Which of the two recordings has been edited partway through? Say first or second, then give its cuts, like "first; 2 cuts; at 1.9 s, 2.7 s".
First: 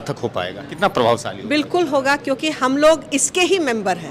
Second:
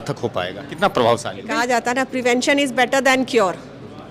second; 1 cut; at 1.4 s